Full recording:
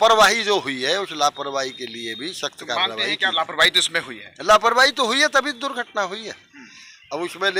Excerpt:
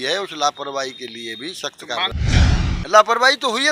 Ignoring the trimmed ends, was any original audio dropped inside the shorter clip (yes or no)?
yes